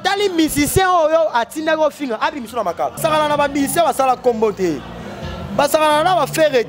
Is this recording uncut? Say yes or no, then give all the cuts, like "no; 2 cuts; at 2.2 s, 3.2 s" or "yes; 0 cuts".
no; 1 cut; at 3.0 s